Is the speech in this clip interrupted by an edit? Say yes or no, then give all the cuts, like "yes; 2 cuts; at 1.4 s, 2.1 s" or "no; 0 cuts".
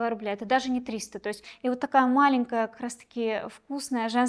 yes; 1 cut; at 1.5 s